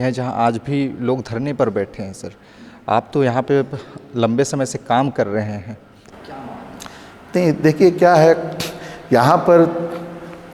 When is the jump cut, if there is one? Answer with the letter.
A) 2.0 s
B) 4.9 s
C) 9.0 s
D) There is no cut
D